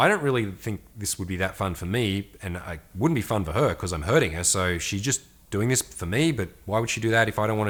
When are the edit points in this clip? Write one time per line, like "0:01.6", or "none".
none